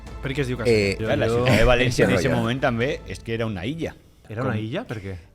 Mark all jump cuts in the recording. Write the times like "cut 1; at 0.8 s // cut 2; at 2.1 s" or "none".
cut 1; at 1.0 s // cut 2; at 4.2 s